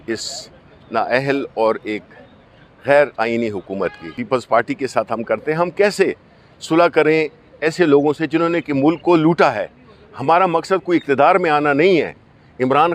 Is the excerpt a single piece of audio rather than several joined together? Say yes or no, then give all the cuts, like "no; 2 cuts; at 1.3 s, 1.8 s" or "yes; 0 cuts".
no; 1 cut; at 4.1 s